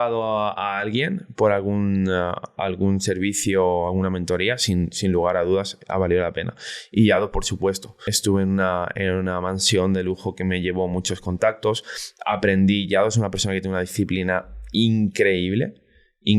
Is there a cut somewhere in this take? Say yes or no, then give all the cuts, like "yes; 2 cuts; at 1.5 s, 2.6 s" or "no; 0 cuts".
yes; 1 cut; at 8.0 s